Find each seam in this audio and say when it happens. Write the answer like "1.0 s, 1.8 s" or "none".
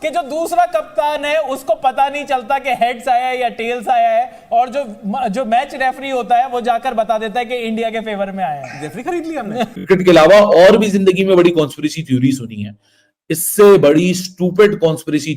9.9 s